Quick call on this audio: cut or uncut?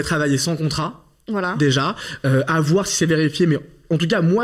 uncut